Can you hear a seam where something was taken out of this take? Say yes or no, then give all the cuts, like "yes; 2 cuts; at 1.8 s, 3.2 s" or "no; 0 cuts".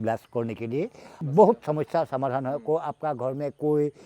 yes; 1 cut; at 1.1 s